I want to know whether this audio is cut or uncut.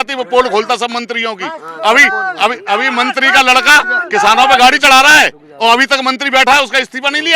uncut